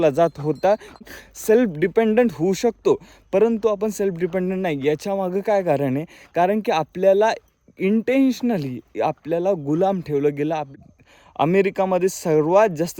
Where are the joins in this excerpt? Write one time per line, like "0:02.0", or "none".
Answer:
0:01.0
0:10.7